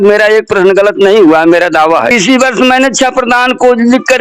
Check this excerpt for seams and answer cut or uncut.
cut